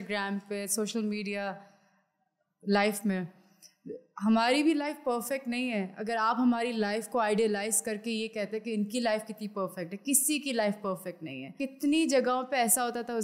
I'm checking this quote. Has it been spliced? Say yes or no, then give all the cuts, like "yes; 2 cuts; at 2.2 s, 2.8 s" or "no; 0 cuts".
yes; 1 cut; at 11.5 s